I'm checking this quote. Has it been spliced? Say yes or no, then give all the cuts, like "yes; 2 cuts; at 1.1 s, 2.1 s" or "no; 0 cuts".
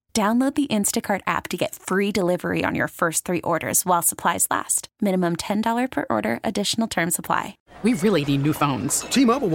yes; 1 cut; at 7.6 s